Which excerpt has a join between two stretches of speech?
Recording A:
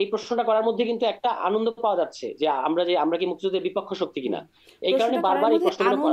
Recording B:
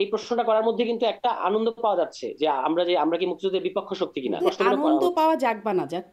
B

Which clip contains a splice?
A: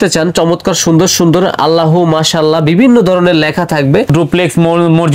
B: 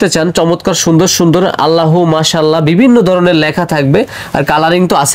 A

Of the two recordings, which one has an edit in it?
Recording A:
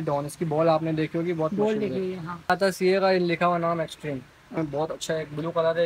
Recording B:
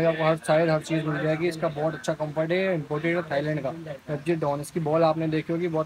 A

